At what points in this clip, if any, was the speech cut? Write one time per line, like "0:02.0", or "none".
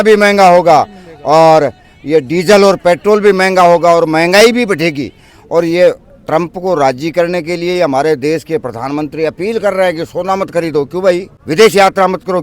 0:11.3